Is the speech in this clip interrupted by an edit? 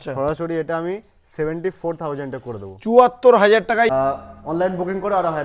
yes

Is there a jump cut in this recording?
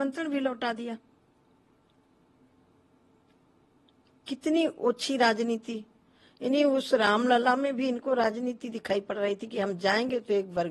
no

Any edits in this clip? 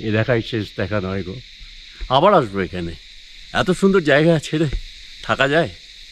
no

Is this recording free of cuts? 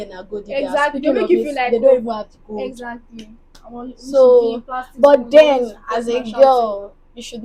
yes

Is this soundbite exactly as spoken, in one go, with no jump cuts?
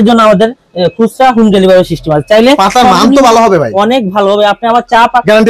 yes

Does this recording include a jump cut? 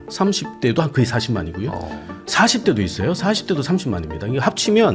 no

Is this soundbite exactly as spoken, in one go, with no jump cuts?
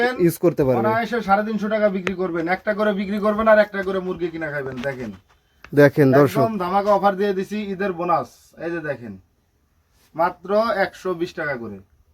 yes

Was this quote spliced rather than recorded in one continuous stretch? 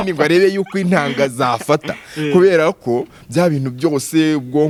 no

